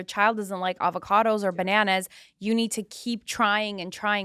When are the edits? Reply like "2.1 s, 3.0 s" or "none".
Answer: none